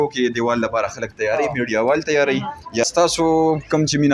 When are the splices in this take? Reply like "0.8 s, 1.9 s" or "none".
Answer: 2.8 s